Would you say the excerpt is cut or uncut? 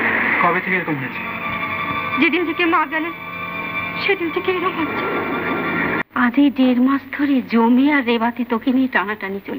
cut